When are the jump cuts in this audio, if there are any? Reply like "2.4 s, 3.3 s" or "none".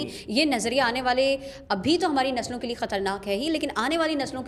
none